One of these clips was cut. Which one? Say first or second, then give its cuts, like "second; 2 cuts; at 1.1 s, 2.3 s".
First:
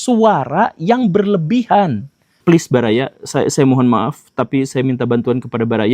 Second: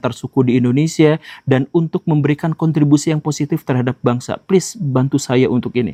first; 1 cut; at 2.4 s